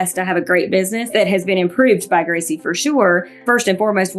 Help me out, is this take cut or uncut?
cut